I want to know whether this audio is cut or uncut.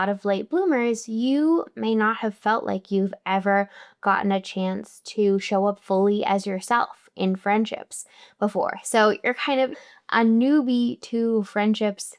uncut